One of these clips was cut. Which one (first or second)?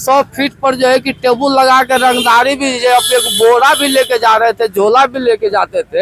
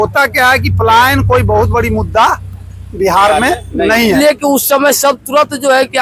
second